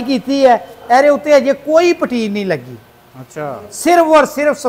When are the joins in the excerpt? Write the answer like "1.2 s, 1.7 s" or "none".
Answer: none